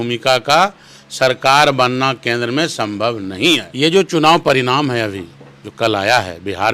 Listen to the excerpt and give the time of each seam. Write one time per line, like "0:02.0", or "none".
0:03.7